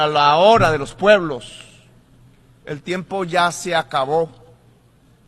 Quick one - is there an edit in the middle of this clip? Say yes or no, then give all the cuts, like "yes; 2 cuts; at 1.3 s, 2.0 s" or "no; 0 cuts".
no; 0 cuts